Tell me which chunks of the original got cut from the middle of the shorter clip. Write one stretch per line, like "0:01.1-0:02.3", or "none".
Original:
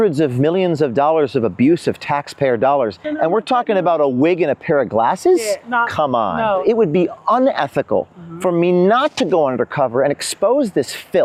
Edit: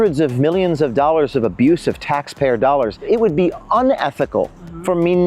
0:03.0-0:06.6